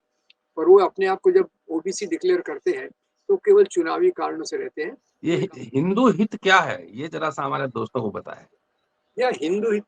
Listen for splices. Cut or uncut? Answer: cut